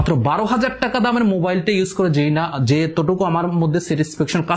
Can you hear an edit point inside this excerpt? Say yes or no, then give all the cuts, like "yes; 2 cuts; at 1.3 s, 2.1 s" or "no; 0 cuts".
no; 0 cuts